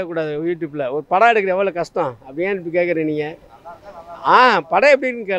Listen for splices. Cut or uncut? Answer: uncut